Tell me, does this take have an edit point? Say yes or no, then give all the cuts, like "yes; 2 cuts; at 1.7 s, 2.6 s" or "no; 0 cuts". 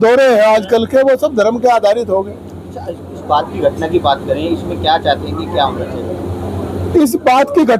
no; 0 cuts